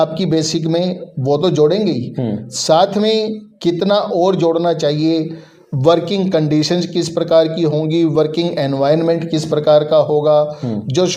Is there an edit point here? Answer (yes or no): no